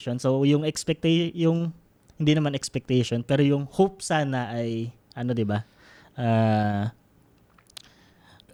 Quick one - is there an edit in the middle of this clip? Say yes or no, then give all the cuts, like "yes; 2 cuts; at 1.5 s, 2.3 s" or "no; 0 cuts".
no; 0 cuts